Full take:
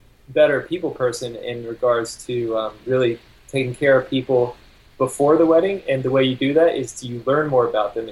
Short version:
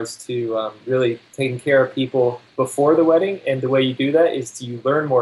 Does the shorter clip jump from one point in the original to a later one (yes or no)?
yes